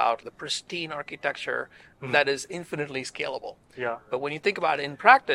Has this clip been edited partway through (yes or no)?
no